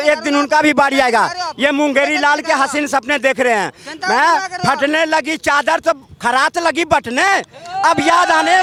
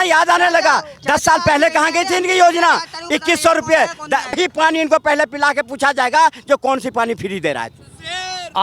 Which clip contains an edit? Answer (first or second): second